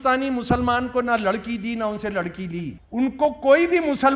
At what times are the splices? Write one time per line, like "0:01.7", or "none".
0:02.8